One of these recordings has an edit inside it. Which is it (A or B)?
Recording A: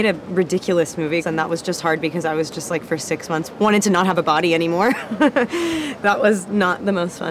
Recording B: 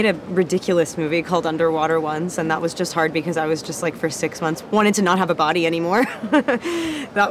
A